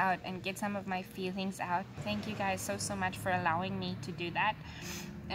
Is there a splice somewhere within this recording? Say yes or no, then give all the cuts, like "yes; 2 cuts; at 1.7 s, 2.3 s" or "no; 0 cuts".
yes; 1 cut; at 2.0 s